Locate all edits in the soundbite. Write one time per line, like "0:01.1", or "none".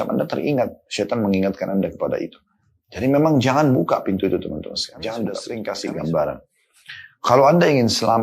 0:05.5